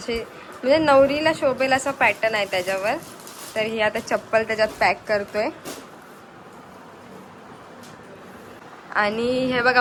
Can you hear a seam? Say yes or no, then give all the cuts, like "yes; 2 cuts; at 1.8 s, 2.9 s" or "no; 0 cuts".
no; 0 cuts